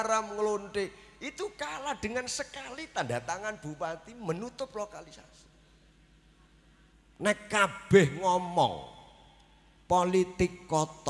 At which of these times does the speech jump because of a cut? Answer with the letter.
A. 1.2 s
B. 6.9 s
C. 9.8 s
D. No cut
B